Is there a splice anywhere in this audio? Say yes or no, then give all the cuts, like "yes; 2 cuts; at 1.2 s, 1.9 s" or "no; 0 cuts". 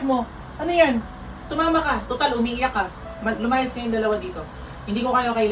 yes; 1 cut; at 1.5 s